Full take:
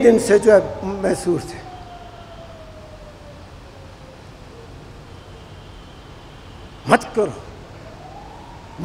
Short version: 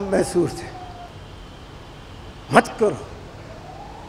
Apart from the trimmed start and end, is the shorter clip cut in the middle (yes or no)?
yes